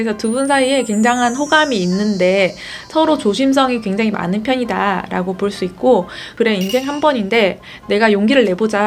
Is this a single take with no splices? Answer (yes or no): no